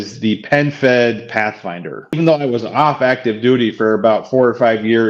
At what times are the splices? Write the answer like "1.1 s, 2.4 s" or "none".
2.2 s